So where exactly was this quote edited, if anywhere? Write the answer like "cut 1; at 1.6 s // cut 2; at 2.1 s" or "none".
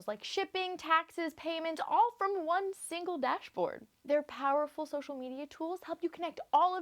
cut 1; at 3.9 s